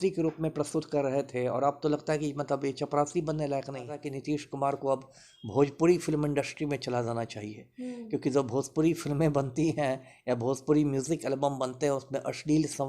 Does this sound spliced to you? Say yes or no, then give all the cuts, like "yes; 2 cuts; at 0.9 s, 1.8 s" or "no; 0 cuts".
yes; 1 cut; at 4.1 s